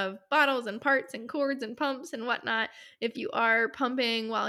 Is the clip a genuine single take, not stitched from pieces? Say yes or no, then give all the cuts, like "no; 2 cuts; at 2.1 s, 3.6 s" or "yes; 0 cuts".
yes; 0 cuts